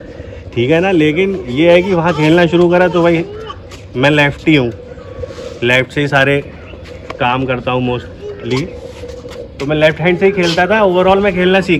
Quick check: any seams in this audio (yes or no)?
no